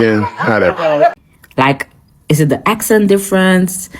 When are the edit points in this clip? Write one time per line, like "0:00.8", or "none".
0:01.1